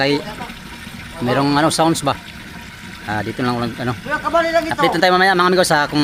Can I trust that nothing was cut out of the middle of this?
yes; 0 cuts

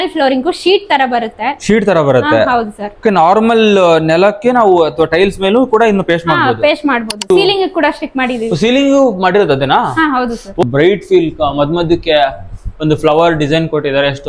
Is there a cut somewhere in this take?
yes; 2 cuts; at 7.3 s, 10.6 s

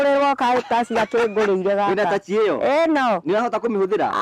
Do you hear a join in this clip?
no; 0 cuts

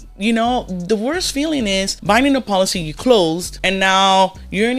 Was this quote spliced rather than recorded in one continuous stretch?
yes; 2 cuts; at 1.9 s, 3.5 s

